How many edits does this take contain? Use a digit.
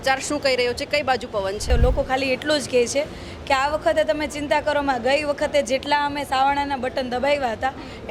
1